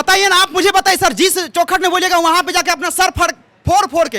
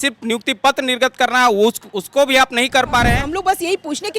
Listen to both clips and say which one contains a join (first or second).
second